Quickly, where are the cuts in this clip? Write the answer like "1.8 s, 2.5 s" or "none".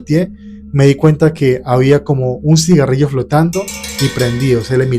none